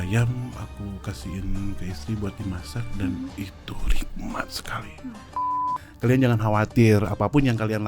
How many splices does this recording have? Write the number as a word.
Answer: one